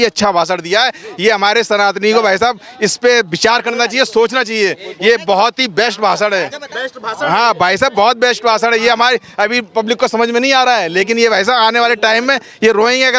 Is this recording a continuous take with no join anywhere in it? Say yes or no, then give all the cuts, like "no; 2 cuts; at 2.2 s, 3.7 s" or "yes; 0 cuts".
yes; 0 cuts